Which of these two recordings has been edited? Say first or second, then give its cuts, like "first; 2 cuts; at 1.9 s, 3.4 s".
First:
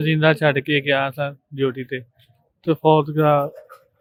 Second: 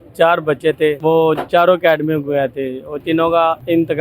second; 2 cuts; at 1.0 s, 3.0 s